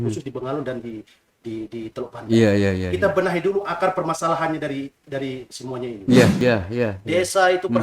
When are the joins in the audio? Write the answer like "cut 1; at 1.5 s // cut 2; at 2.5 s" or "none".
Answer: cut 1; at 6.4 s